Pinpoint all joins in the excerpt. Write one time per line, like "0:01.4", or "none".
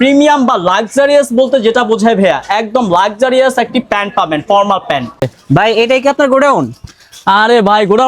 0:05.2